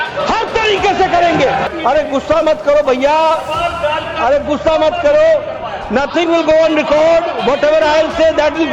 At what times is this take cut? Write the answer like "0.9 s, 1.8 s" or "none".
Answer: 1.7 s